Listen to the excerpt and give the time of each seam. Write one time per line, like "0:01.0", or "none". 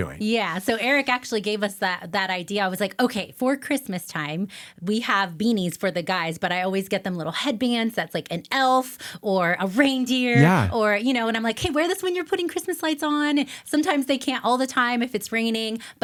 none